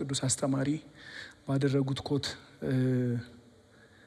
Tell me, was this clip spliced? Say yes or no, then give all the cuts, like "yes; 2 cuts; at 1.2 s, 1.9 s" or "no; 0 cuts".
no; 0 cuts